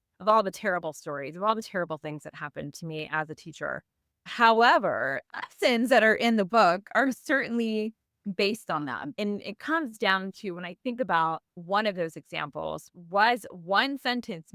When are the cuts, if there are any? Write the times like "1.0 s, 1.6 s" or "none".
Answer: 9.1 s, 11.5 s